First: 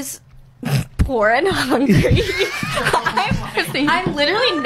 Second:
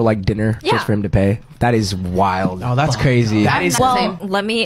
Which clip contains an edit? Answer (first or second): second